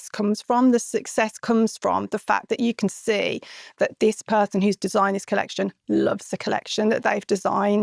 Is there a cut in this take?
no; 0 cuts

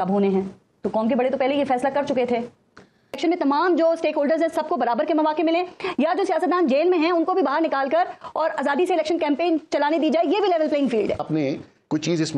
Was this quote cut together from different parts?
yes; 2 cuts; at 3.2 s, 11.2 s

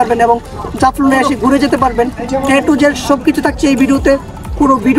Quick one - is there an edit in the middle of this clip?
no; 0 cuts

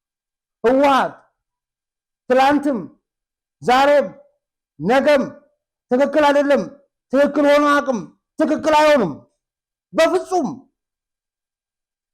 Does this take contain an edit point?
no; 0 cuts

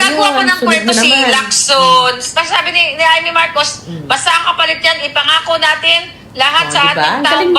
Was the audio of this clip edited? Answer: yes; 1 cut; at 2.2 s

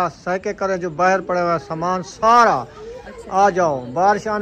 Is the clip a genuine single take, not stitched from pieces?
yes; 0 cuts

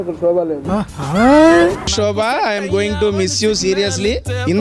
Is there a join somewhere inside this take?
no; 0 cuts

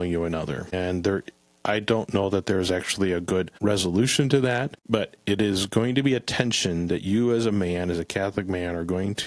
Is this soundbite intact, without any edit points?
no; 3 cuts; at 0.7 s, 3.5 s, 4.7 s

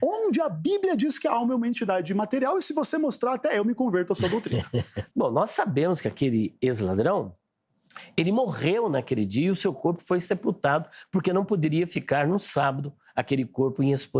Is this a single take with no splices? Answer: no; 1 cut; at 5.0 s

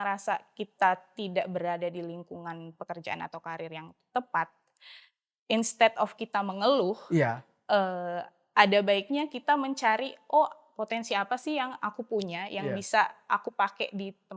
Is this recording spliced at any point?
no; 0 cuts

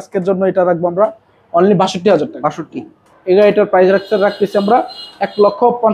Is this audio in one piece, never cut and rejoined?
no; 1 cut; at 3.1 s

